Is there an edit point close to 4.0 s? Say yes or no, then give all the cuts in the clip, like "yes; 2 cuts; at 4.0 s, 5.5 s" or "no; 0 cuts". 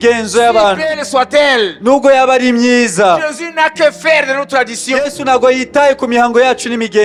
no; 0 cuts